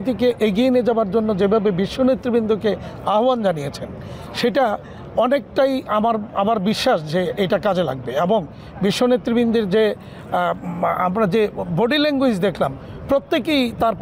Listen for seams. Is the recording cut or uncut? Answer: uncut